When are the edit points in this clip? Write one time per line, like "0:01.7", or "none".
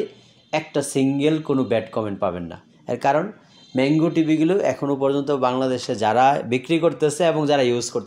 none